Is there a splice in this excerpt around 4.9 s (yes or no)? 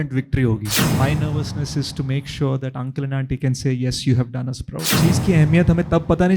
yes